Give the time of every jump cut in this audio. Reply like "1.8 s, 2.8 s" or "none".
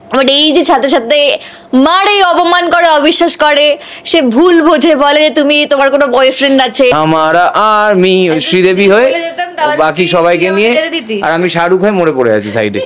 6.9 s